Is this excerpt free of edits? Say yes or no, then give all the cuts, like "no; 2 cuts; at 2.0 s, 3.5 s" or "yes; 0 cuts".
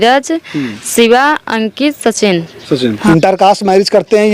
no; 1 cut; at 3.0 s